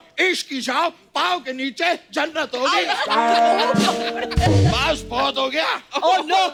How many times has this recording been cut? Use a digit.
0